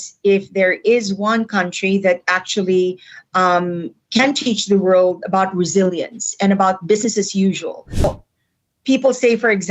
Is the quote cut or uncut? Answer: cut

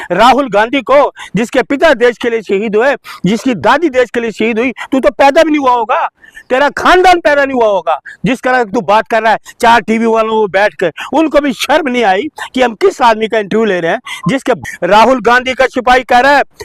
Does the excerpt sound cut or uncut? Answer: cut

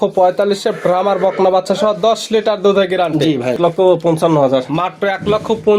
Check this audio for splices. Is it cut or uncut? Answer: cut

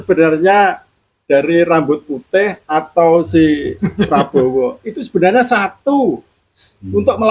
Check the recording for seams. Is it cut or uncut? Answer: uncut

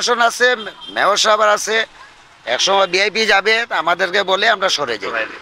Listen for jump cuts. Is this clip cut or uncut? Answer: uncut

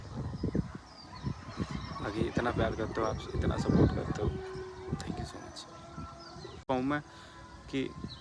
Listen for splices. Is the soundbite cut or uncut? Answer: cut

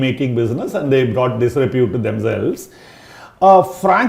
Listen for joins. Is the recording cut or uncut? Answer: uncut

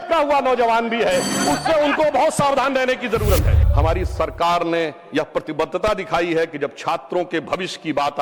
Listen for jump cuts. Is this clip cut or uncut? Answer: cut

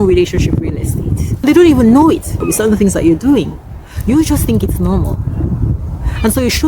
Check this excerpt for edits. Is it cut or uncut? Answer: cut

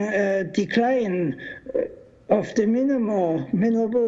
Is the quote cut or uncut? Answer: uncut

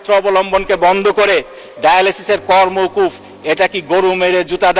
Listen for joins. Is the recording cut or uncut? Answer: uncut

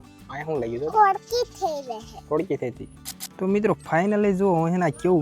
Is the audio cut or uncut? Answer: cut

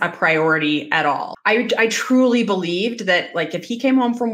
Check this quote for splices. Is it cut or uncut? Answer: cut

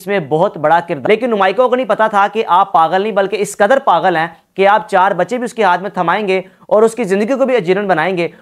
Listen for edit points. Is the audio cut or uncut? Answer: cut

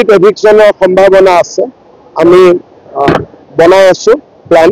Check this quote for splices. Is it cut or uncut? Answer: uncut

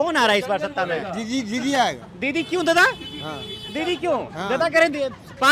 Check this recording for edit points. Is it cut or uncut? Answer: uncut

